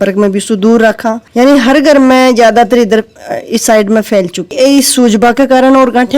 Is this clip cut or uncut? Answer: cut